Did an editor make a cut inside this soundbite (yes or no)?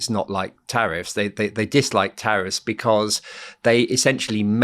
no